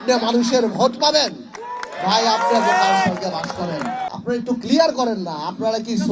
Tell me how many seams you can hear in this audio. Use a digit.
1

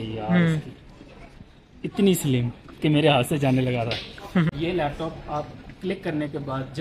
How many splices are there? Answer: 1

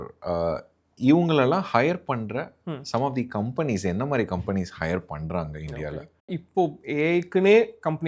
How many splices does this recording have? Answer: 1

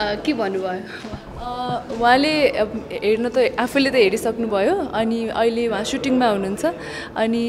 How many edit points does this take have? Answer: 0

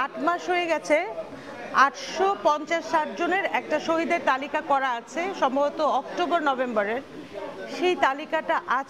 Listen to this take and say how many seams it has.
0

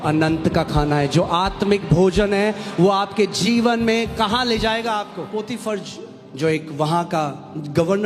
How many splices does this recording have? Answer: 1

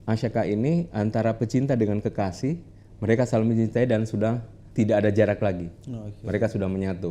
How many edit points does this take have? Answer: 1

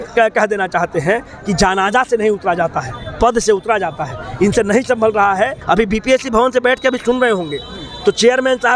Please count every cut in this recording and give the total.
1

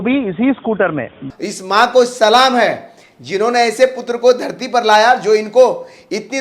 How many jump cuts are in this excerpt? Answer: 1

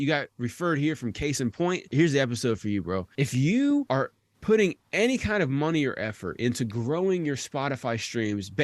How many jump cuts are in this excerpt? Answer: 3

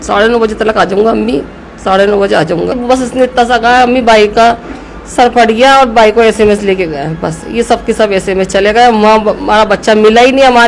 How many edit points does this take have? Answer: 1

